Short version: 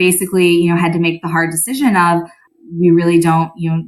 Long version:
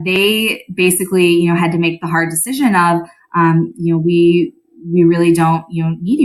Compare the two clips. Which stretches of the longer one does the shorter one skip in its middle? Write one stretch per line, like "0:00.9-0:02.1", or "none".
0:03.2-0:04.6